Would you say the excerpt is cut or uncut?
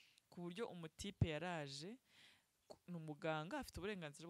uncut